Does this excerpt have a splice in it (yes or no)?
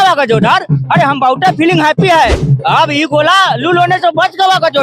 yes